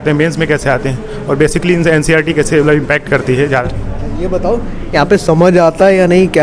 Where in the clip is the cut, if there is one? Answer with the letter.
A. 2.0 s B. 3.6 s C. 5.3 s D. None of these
B